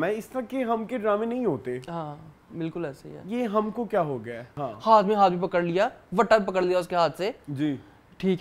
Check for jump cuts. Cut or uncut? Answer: cut